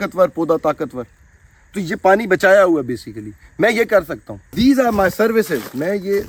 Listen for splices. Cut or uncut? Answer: uncut